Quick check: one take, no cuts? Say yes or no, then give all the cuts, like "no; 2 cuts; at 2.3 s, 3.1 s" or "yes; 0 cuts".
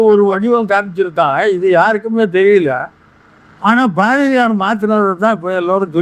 yes; 0 cuts